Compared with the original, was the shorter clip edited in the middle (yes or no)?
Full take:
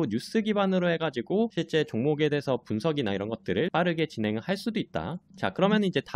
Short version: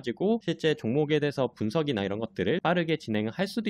no